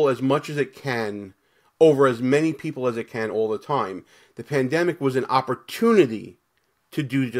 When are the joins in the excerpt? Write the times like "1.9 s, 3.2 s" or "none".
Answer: none